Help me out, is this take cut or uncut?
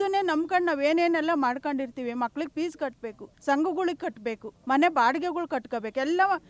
cut